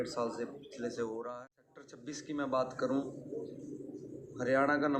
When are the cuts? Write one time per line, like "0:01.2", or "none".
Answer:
0:02.1